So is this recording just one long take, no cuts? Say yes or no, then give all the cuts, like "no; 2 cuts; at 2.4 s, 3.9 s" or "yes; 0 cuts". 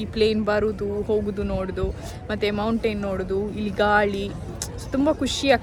yes; 0 cuts